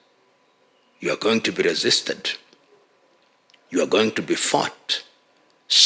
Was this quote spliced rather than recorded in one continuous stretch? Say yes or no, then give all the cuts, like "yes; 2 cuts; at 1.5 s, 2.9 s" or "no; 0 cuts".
no; 0 cuts